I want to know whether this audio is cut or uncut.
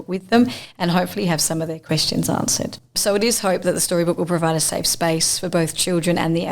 cut